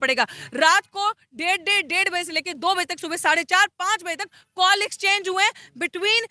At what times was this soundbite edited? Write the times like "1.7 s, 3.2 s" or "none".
none